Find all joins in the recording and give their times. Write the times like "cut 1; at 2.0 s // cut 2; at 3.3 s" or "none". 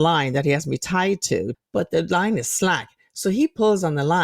cut 1; at 1.5 s